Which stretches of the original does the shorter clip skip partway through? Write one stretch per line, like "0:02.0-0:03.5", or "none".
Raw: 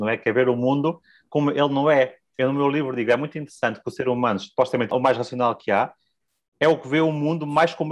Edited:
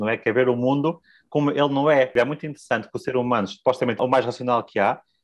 0:02.1-0:03.0